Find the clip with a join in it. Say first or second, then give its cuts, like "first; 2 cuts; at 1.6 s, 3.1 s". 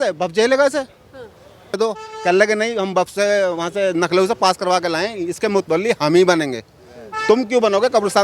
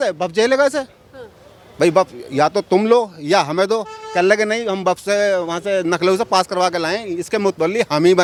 first; 1 cut; at 1.8 s